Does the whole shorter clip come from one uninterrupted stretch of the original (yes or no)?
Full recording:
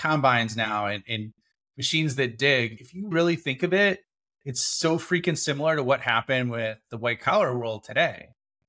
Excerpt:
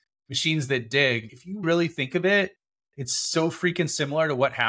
yes